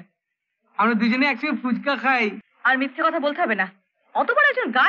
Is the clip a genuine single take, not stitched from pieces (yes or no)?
no